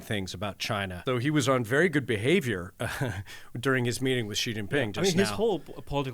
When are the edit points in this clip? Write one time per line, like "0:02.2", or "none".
0:01.0